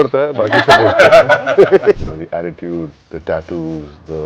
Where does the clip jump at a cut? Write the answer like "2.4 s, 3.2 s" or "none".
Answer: 2.0 s, 3.1 s